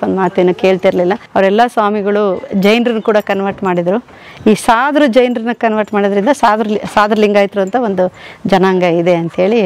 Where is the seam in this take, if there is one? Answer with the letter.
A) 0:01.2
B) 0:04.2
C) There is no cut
A